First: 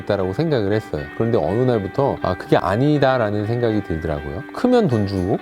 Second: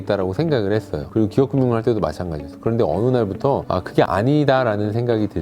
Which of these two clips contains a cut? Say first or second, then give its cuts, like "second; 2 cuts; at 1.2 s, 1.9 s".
first; 1 cut; at 1.0 s